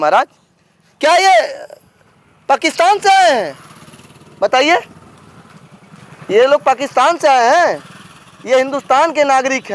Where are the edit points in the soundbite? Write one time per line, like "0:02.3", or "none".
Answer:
none